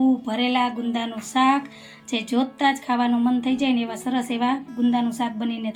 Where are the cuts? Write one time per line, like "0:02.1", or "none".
none